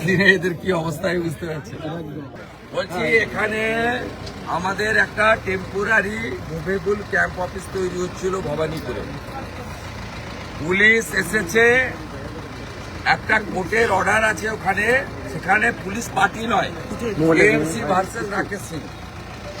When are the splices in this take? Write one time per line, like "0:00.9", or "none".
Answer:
0:02.4